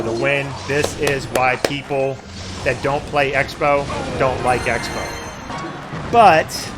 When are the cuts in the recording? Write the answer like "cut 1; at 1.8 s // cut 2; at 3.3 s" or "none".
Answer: cut 1; at 5.5 s